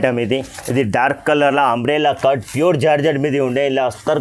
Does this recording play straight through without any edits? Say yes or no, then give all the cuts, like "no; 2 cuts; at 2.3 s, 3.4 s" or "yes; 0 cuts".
yes; 0 cuts